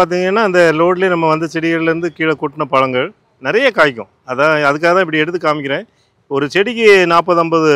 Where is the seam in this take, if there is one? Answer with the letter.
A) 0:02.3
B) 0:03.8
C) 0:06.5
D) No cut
D